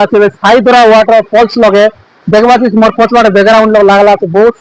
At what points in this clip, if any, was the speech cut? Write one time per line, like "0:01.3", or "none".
none